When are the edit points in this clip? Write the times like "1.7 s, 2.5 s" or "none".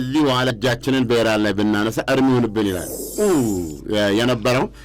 3.1 s